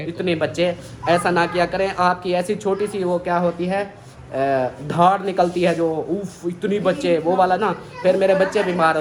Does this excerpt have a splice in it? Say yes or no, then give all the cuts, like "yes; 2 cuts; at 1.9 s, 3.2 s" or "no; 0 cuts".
no; 0 cuts